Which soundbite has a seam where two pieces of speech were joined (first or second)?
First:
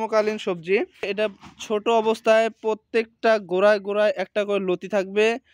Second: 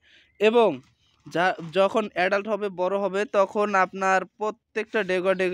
first